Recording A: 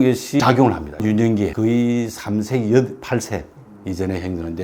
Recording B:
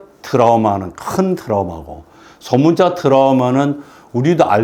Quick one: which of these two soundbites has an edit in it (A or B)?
A